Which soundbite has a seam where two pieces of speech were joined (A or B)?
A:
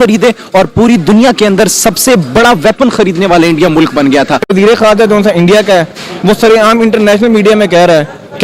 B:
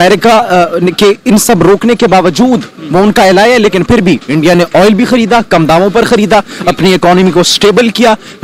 A